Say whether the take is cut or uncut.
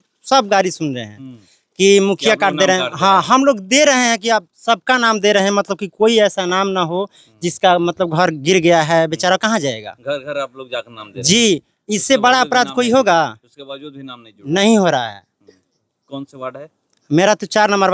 uncut